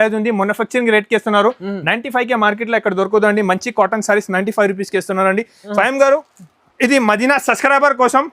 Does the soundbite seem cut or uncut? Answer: cut